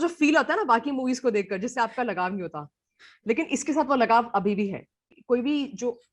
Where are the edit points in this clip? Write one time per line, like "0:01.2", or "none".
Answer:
0:05.1